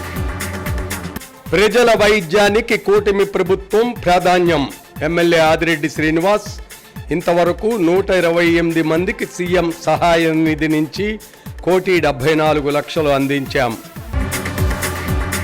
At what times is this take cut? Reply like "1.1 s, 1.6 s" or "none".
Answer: 1.1 s